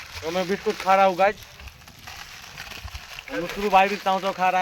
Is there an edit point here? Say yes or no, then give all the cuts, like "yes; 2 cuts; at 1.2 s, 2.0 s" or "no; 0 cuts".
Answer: no; 0 cuts